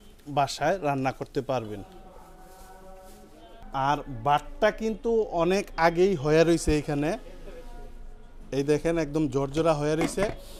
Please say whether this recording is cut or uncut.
uncut